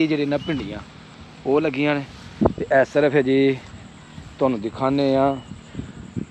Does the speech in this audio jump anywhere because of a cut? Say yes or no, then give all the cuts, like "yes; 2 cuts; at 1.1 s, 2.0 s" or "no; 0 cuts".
no; 0 cuts